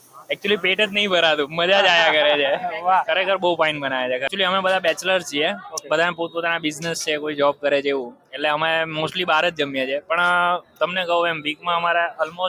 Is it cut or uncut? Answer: uncut